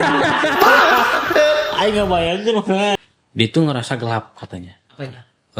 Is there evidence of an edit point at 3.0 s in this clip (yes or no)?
yes